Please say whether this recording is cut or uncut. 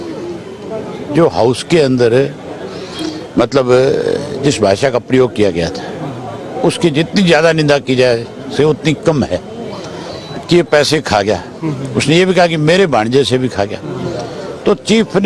cut